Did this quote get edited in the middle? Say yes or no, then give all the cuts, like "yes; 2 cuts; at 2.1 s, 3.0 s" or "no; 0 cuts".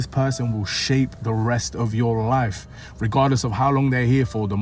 no; 0 cuts